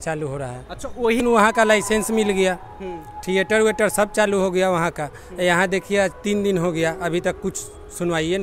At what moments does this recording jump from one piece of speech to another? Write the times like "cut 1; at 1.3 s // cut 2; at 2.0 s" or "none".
cut 1; at 1.2 s